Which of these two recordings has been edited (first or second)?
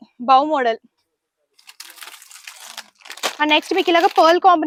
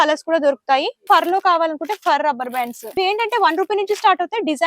second